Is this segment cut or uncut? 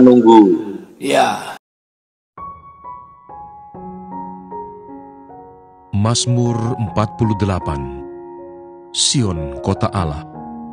cut